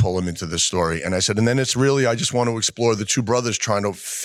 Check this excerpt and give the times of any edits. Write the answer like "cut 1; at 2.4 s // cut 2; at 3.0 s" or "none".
none